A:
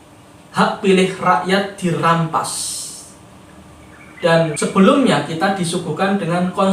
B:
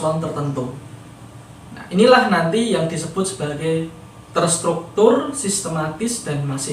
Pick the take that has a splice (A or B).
A